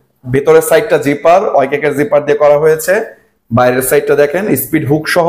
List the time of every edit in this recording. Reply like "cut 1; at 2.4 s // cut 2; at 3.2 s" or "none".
none